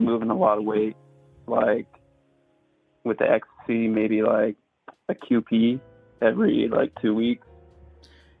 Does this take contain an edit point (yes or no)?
no